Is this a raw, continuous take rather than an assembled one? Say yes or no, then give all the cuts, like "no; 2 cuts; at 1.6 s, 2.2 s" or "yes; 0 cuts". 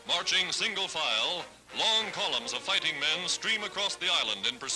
yes; 0 cuts